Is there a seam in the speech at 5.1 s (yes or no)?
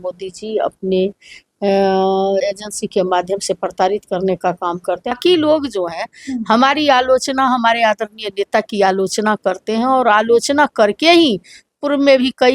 yes